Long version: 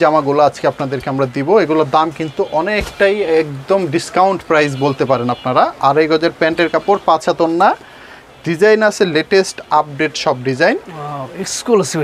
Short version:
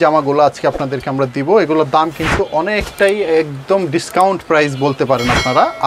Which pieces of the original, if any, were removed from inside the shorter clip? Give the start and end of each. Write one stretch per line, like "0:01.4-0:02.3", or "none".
none